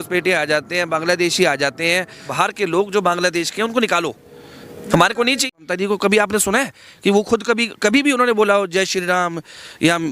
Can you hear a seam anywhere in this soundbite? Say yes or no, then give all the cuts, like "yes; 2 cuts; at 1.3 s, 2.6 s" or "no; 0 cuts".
yes; 2 cuts; at 2.2 s, 5.6 s